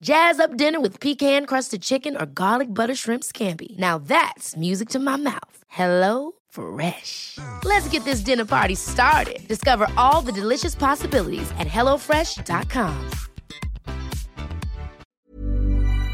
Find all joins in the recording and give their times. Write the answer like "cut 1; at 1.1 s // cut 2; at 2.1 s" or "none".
cut 1; at 15.0 s